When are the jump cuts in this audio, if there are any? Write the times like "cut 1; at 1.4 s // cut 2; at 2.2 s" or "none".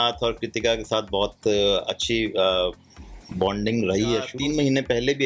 cut 1; at 4.3 s